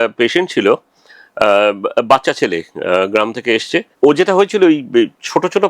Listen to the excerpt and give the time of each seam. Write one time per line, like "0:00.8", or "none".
0:03.9